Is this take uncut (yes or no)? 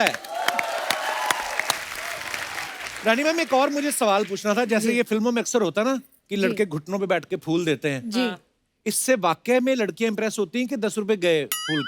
no